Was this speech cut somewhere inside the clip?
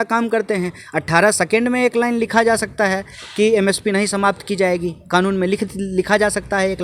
no; 0 cuts

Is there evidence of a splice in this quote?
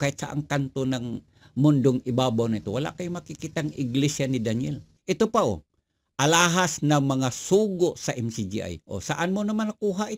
yes; 1 cut; at 4.9 s

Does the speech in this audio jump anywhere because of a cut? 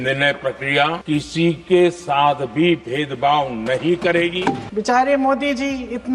yes; 2 cuts; at 1.0 s, 4.6 s

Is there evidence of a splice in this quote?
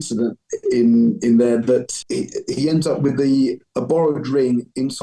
yes; 1 cut; at 2.0 s

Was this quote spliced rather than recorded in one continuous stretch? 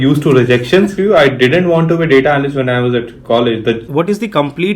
yes; 2 cuts; at 1.0 s, 3.8 s

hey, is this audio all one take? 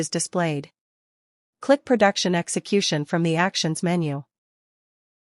yes; 0 cuts

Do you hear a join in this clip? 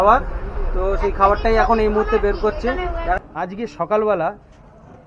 yes; 1 cut; at 3.2 s

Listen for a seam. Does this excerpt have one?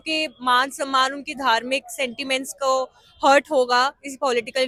no; 0 cuts

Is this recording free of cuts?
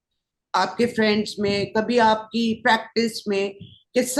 yes; 0 cuts

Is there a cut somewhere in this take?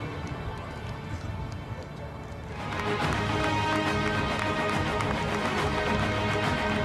yes; 1 cut; at 5.1 s

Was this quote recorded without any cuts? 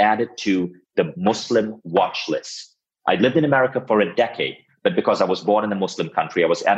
no; 1 cut; at 1.1 s

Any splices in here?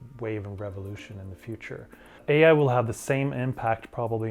yes; 1 cut; at 2.2 s

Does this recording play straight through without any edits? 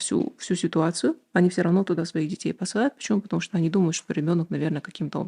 yes; 0 cuts

